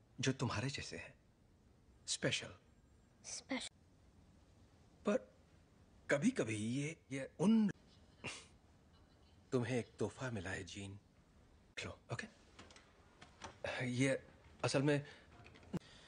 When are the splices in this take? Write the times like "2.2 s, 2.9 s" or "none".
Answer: none